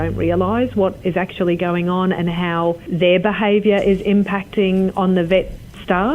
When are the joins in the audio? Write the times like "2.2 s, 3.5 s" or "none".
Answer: 2.9 s